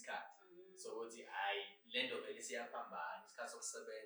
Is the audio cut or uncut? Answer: uncut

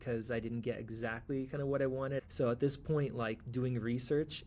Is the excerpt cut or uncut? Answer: cut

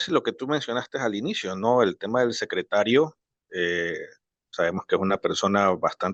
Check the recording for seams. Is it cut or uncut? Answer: uncut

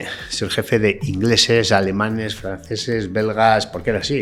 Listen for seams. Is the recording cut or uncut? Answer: uncut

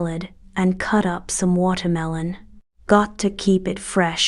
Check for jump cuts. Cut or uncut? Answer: cut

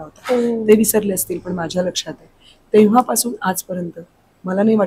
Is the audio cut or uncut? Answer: uncut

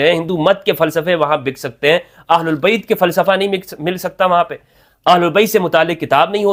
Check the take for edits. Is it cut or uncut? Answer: uncut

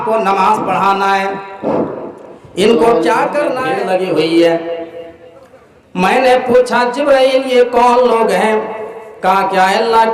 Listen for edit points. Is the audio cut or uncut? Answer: cut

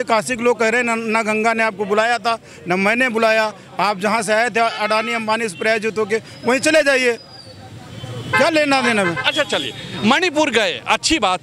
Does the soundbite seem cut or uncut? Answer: uncut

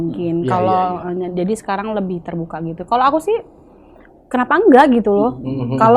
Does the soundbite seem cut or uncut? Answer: uncut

